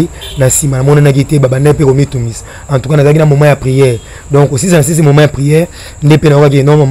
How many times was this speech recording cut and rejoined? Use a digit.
0